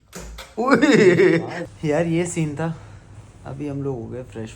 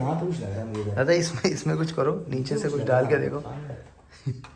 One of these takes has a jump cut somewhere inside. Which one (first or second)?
first